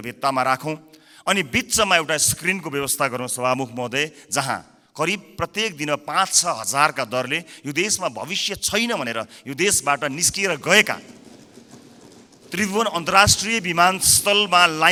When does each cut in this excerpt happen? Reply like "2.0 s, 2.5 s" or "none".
none